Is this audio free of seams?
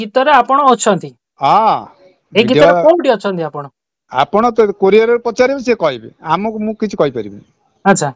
yes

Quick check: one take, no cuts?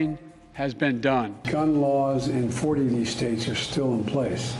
no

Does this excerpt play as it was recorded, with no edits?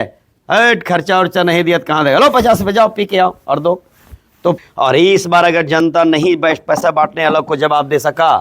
no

